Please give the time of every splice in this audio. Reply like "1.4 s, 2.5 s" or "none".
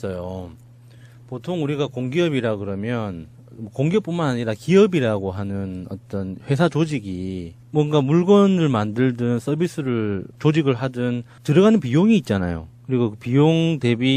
6.1 s